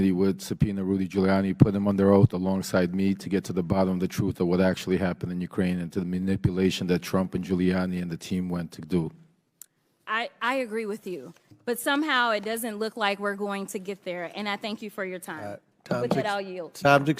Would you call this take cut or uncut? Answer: uncut